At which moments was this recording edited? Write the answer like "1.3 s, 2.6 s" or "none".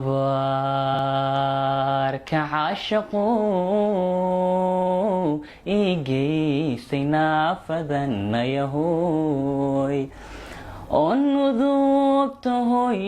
0.9 s